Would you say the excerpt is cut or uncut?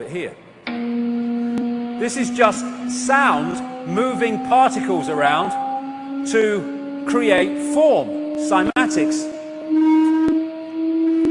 uncut